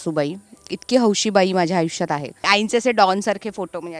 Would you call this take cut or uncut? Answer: cut